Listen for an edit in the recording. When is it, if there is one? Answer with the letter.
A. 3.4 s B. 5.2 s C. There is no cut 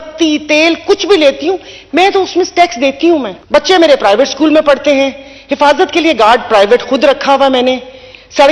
A